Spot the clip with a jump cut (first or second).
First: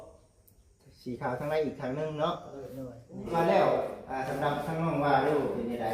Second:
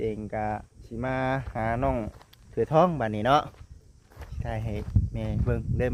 first